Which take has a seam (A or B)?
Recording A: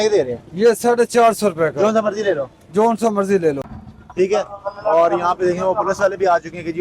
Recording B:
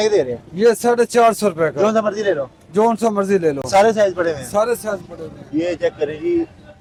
A